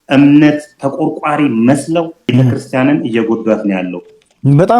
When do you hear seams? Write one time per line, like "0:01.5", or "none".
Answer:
0:02.3